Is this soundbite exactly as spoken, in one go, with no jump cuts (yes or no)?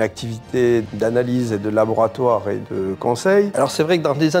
no